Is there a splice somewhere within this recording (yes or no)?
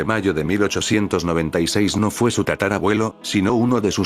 no